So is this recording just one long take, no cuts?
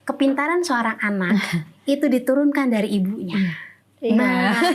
yes; 0 cuts

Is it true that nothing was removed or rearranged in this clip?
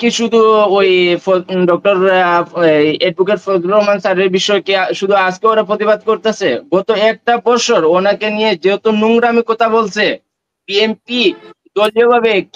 yes; 0 cuts

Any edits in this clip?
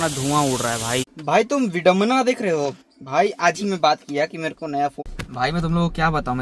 yes; 2 cuts; at 1.1 s, 5.0 s

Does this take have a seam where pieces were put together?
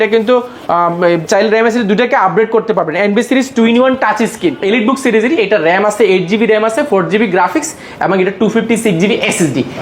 yes; 1 cut; at 4.6 s

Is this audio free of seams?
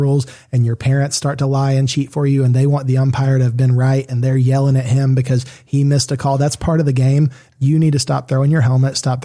yes; 0 cuts

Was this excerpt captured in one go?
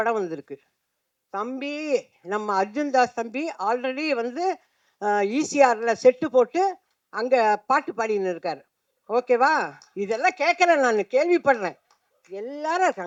yes; 0 cuts

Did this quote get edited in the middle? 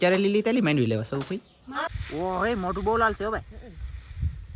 yes; 1 cut; at 1.9 s

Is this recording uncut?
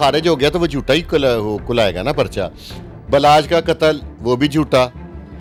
yes; 0 cuts

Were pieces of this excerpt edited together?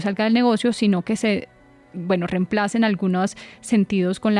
no; 0 cuts

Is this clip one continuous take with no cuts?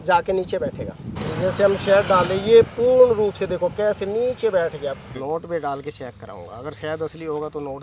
no; 2 cuts; at 1.2 s, 5.2 s

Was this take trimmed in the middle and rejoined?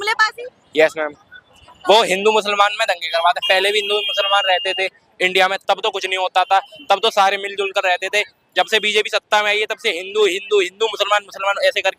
no; 0 cuts

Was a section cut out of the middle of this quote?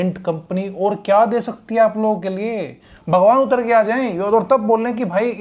no; 0 cuts

